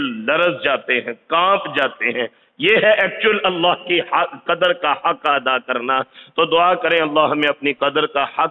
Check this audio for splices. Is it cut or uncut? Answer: uncut